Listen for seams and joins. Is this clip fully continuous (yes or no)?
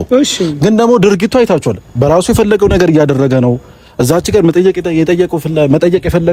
yes